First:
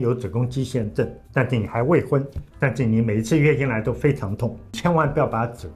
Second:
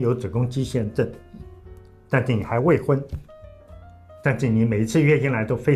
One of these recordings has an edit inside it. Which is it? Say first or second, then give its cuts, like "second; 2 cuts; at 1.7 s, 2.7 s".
first; 3 cuts; at 1.2 s, 2.4 s, 4.8 s